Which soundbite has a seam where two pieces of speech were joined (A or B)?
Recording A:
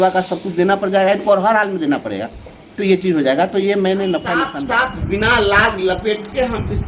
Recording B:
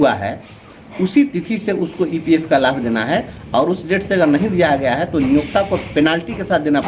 A